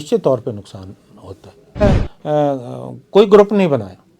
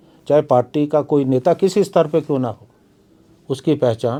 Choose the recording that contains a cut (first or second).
first